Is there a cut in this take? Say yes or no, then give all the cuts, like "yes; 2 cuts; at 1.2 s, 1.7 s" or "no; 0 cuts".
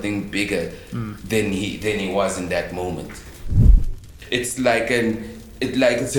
yes; 1 cut; at 3.8 s